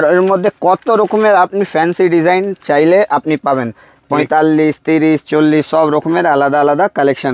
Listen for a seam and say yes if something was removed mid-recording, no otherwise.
no